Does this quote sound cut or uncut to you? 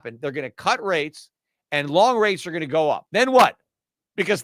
cut